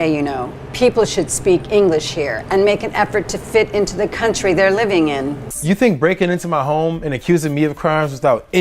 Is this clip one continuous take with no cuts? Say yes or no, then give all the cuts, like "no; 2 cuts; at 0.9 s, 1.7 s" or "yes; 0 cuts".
no; 1 cut; at 5.5 s